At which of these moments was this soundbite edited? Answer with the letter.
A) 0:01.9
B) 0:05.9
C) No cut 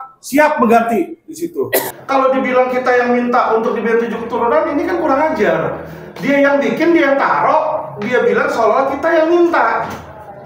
A